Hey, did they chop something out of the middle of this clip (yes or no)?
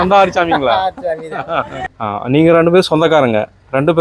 yes